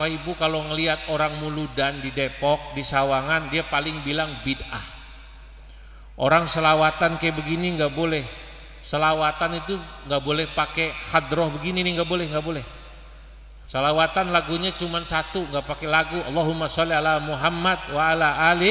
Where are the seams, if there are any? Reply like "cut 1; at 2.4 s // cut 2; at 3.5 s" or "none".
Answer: none